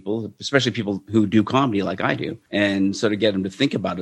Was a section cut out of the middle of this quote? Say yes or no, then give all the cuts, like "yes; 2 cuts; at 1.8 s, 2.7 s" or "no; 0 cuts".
yes; 2 cuts; at 1.0 s, 2.4 s